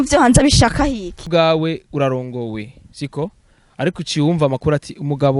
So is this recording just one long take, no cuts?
no; 1 cut; at 1.3 s

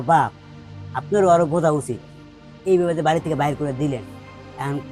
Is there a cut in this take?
no; 0 cuts

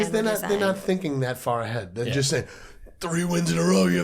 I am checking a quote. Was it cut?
no; 0 cuts

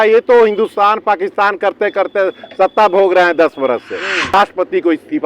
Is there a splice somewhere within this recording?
yes; 1 cut; at 4.3 s

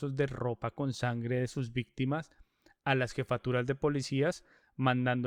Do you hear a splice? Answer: no; 0 cuts

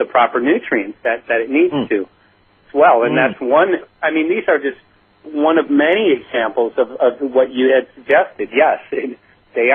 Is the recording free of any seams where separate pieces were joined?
yes; 0 cuts

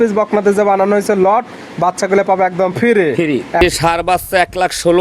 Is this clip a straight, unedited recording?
no; 1 cut; at 3.6 s

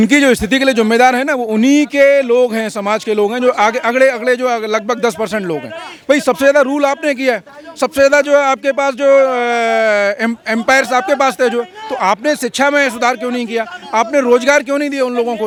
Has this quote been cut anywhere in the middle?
no; 0 cuts

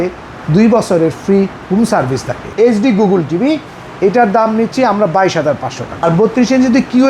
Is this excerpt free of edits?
no; 2 cuts; at 2.5 s, 6.0 s

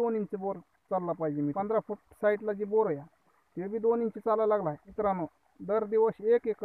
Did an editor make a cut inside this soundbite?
yes; 2 cuts; at 1.5 s, 4.8 s

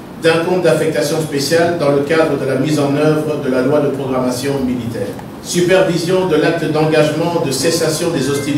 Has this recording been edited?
no; 0 cuts

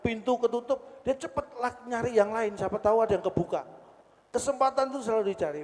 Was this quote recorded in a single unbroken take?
yes; 0 cuts

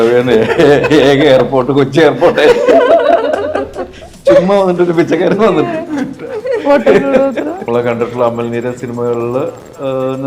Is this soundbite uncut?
no; 1 cut; at 7.6 s

